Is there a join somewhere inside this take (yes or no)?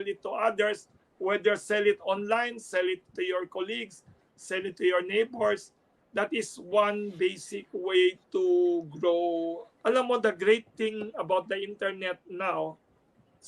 yes